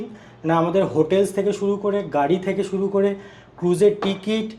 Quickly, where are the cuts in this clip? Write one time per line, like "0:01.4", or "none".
none